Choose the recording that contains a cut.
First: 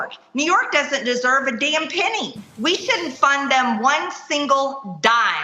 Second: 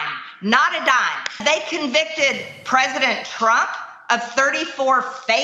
second; 1 cut; at 1.4 s

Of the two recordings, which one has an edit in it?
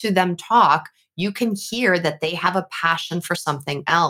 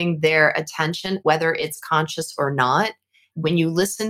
second; 2 cuts; at 1.2 s, 3.3 s

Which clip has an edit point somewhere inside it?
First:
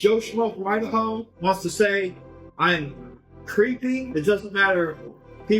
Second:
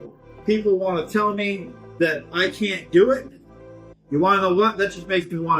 first; 2 cuts; at 1.2 s, 4.1 s

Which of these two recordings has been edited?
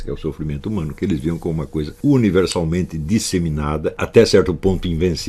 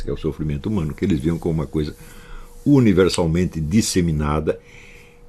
first; 2 cuts; at 1.9 s, 4.0 s

